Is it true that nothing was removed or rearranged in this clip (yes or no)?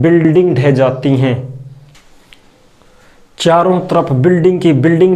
yes